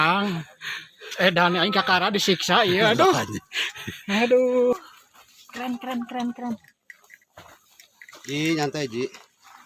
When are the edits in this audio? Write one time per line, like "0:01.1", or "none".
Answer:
0:04.7